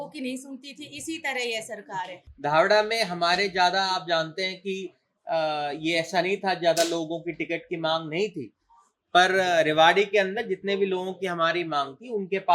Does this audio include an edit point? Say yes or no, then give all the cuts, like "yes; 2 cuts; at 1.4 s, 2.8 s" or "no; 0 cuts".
yes; 1 cut; at 2.2 s